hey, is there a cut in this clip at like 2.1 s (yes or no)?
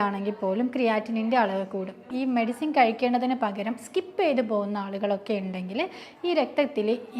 yes